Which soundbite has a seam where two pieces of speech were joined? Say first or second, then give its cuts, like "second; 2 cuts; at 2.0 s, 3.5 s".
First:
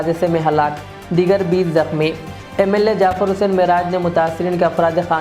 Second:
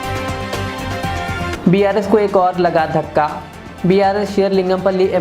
second; 1 cut; at 1.5 s